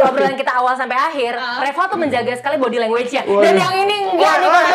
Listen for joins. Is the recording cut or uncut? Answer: uncut